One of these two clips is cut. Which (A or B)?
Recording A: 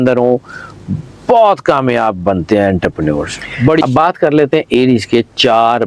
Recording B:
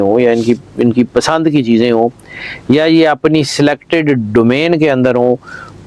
A